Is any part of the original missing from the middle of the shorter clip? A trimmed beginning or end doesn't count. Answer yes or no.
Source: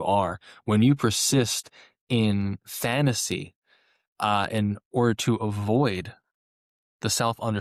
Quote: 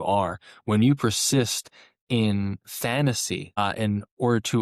yes